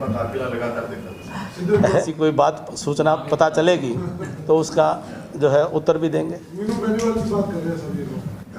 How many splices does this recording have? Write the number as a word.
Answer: one